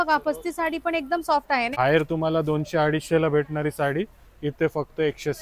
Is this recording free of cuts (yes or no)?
no